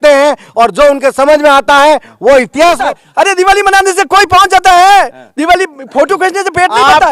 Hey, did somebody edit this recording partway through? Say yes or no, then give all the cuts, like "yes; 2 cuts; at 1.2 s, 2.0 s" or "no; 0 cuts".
yes; 1 cut; at 2.8 s